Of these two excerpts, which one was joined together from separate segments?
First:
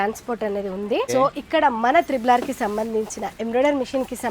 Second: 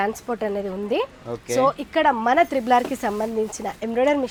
first; 1 cut; at 1.1 s

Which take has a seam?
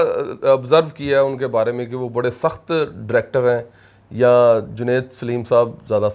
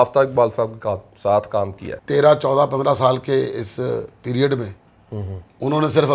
second; 1 cut; at 1.9 s

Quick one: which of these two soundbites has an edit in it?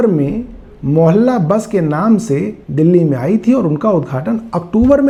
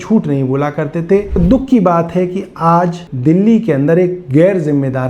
second; 2 cuts; at 1.4 s, 3.1 s

